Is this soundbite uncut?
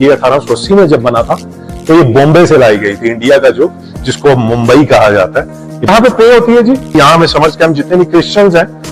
yes; 0 cuts

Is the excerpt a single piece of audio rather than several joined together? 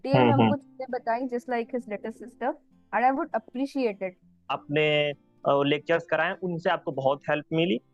no; 1 cut; at 4.4 s

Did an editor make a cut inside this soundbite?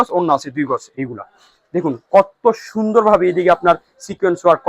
yes; 1 cut; at 1.0 s

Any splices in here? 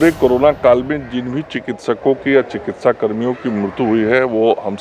no; 0 cuts

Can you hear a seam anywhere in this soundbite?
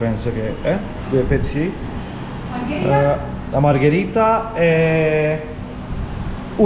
no; 0 cuts

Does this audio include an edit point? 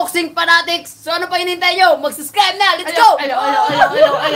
no; 0 cuts

